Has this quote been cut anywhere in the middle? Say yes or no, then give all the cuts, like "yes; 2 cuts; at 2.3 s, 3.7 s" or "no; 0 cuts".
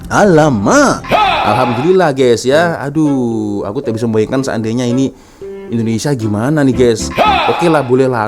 yes; 1 cut; at 1.5 s